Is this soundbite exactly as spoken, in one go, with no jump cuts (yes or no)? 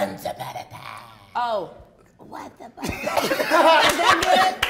no